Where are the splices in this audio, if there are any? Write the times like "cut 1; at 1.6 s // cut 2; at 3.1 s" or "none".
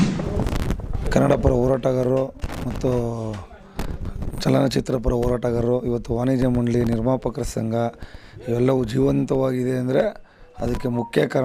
none